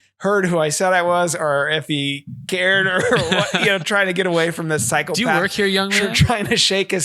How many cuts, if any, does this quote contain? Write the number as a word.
zero